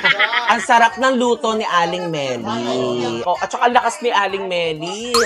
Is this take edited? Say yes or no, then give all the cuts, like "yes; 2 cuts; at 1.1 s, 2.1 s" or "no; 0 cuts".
yes; 1 cut; at 3.2 s